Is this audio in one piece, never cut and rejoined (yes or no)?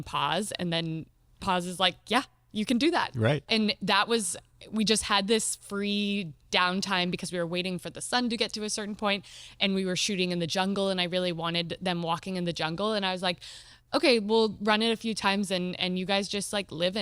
no